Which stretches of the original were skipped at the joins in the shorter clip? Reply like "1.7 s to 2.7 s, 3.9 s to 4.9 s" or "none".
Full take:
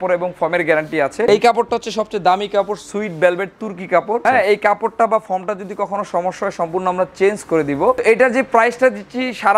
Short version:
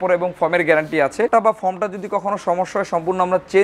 1.3 s to 4.9 s